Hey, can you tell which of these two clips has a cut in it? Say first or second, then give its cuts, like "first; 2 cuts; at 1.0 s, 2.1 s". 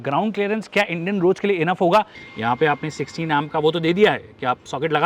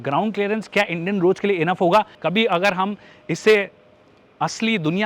first; 1 cut; at 2.1 s